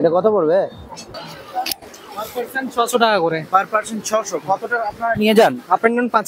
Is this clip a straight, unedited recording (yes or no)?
no